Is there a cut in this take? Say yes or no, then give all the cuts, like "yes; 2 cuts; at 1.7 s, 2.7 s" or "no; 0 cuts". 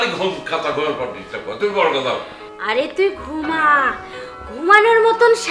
no; 0 cuts